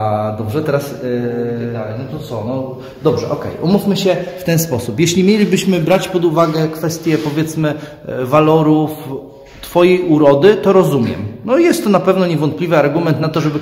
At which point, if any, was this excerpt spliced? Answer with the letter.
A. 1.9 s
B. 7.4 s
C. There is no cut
A